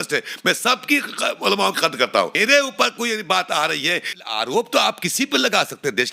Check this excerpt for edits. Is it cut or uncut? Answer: cut